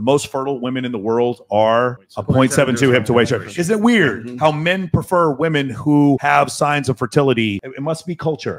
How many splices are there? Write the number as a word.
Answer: two